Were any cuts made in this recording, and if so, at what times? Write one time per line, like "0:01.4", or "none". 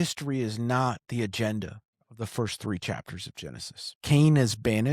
0:03.9